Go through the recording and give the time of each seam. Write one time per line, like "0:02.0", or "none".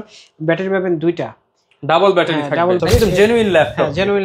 0:02.8